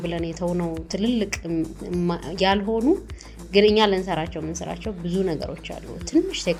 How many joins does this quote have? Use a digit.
0